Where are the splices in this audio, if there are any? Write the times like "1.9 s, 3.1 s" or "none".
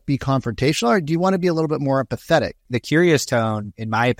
2.7 s